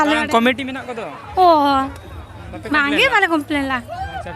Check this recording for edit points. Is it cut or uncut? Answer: uncut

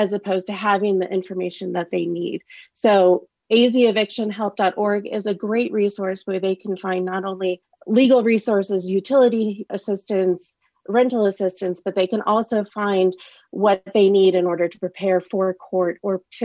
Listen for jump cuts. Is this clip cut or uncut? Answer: uncut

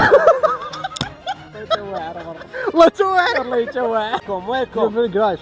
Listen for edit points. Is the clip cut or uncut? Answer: cut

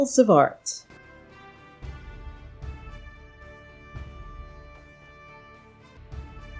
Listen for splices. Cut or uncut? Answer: uncut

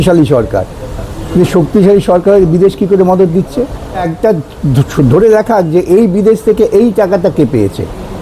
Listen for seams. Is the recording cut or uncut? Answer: cut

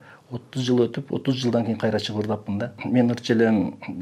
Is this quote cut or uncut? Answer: cut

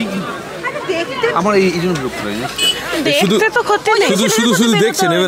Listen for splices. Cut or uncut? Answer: uncut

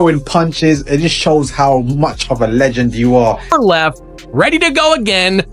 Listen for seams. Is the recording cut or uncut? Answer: cut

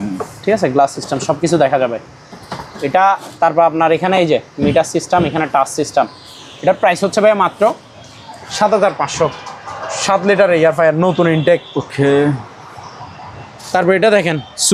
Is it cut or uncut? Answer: uncut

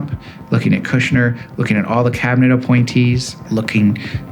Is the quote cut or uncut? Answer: cut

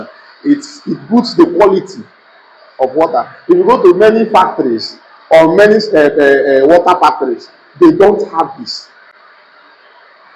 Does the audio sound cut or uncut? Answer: uncut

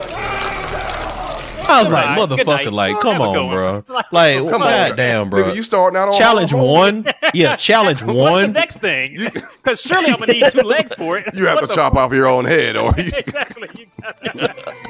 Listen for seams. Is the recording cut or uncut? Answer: uncut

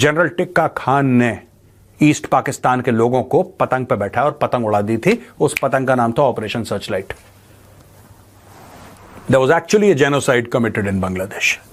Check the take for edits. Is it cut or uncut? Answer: uncut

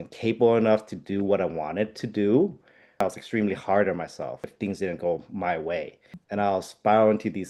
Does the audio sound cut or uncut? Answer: cut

